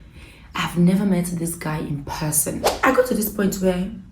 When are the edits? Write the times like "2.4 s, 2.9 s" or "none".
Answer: 2.7 s